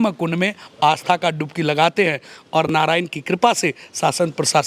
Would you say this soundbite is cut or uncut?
uncut